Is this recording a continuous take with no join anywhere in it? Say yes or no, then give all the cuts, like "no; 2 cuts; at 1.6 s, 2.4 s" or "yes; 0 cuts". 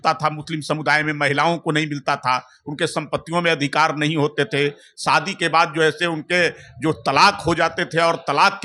yes; 0 cuts